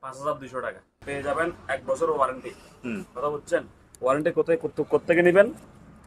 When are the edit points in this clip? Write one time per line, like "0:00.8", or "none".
0:00.9